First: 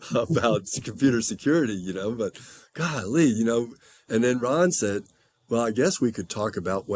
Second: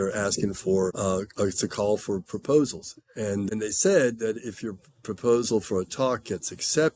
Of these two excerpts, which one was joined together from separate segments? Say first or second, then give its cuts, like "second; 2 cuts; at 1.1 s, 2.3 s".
second; 2 cuts; at 1.0 s, 3.5 s